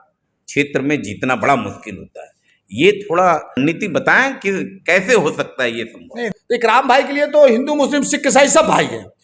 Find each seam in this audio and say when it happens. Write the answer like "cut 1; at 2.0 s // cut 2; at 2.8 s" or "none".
cut 1; at 3.5 s // cut 2; at 6.3 s